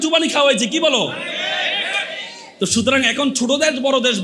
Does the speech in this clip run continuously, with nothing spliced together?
yes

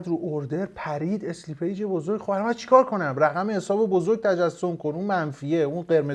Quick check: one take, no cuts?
yes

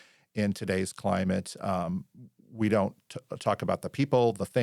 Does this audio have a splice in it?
no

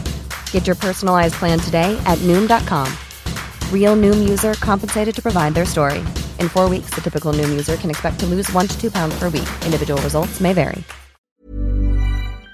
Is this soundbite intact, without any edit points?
no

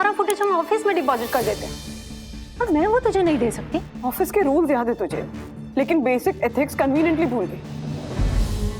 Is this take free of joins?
yes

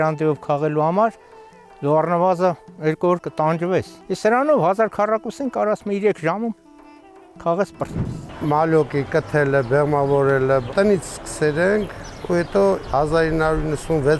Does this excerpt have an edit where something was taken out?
yes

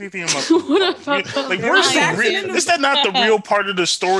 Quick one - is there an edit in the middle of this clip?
no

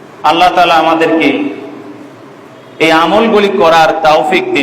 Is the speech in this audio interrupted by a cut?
no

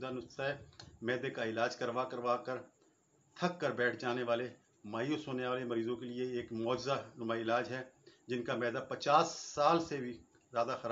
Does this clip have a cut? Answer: no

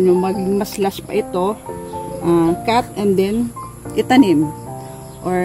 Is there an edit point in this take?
no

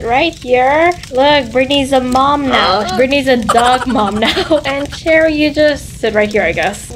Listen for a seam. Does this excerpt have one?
no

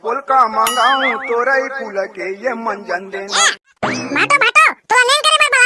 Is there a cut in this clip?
yes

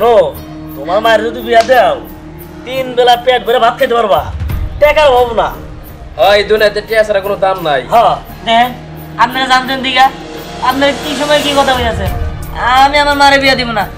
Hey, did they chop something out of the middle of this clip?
no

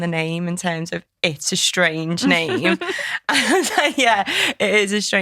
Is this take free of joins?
yes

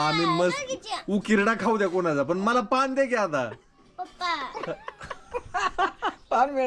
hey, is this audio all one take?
yes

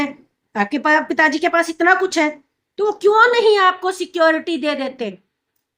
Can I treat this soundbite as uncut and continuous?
yes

